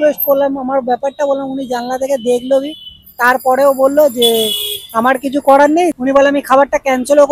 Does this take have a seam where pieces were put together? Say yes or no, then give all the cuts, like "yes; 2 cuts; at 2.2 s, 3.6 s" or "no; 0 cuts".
yes; 1 cut; at 5.9 s